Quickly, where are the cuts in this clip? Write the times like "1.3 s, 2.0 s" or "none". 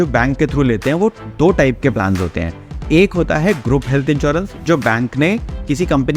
none

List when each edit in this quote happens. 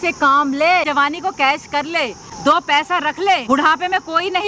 0.9 s, 2.2 s, 3.4 s

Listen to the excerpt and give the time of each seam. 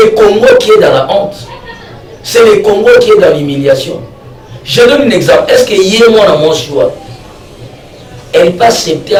none

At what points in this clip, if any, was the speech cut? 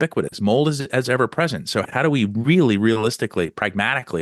1.9 s

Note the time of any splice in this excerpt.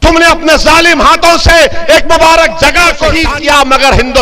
3.2 s

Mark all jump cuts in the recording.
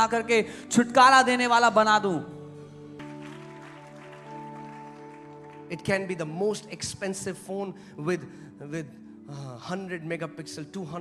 3.0 s

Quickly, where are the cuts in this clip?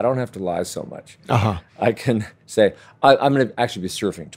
none

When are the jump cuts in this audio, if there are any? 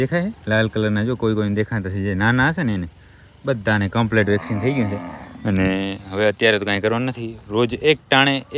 none

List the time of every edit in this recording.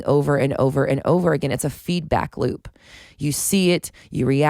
none

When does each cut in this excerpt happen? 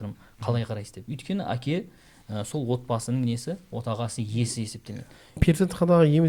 5.4 s

